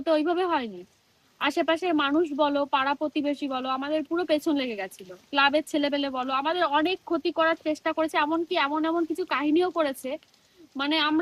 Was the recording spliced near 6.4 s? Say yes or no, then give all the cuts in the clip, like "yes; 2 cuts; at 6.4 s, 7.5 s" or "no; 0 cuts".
no; 0 cuts